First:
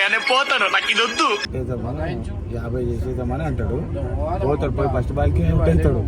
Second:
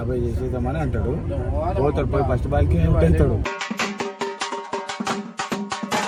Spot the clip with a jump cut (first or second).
first